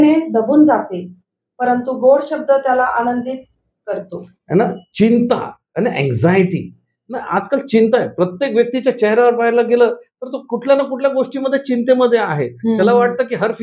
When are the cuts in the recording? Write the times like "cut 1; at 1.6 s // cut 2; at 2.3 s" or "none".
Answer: cut 1; at 5.6 s